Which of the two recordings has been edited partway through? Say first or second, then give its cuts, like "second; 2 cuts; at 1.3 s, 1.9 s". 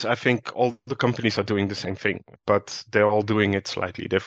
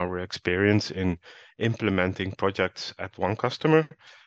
first; 1 cut; at 2.3 s